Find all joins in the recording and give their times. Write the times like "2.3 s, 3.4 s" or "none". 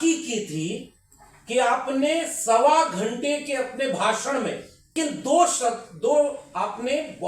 4.9 s